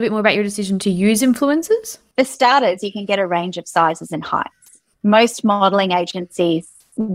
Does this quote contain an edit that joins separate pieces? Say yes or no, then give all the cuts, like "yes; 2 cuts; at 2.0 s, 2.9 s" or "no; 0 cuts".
yes; 1 cut; at 2.0 s